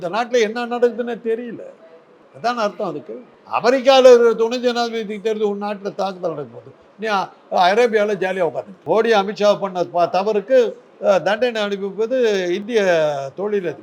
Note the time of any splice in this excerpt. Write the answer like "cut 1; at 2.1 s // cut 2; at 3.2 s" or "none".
cut 1; at 8.7 s